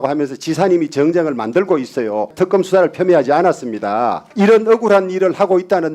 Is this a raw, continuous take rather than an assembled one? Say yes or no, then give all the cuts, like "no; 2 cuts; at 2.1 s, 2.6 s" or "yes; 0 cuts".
no; 2 cuts; at 2.3 s, 4.2 s